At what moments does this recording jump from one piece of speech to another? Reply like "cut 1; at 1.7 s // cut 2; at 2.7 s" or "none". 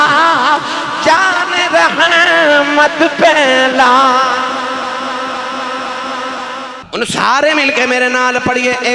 cut 1; at 6.8 s

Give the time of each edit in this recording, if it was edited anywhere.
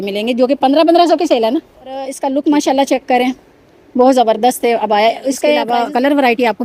cut 1; at 2.2 s // cut 2; at 5.7 s

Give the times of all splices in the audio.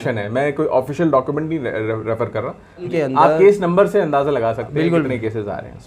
cut 1; at 2.9 s

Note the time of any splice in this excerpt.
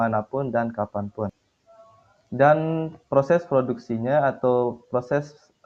none

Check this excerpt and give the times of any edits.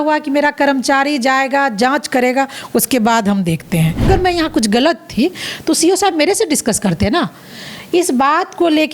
cut 1; at 4.1 s

